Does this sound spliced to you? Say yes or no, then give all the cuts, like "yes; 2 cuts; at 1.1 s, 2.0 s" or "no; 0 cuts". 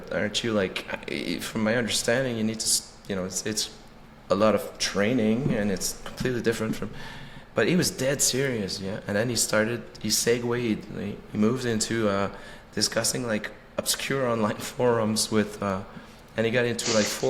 no; 0 cuts